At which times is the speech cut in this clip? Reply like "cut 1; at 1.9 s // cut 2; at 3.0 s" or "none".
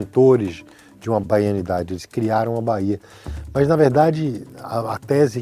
cut 1; at 1.2 s